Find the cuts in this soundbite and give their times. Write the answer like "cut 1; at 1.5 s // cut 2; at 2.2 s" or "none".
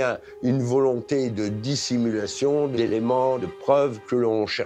cut 1; at 3.2 s